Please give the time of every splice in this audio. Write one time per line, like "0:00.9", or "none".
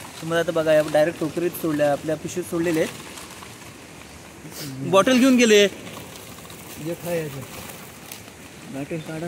none